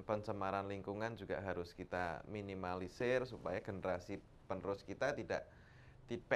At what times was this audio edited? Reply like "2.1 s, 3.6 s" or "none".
none